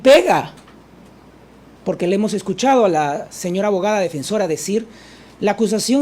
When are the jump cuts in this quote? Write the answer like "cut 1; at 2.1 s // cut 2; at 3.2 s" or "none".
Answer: cut 1; at 1.7 s